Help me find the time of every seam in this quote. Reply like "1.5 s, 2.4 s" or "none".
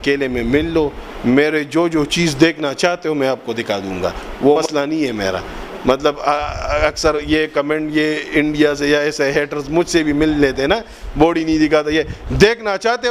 none

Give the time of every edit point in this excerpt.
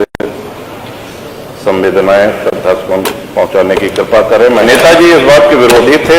4.6 s

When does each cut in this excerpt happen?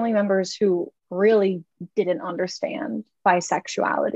1.0 s

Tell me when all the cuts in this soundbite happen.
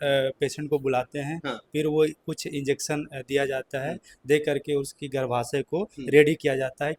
none

